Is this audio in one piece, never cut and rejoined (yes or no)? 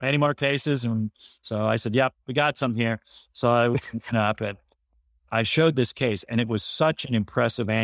yes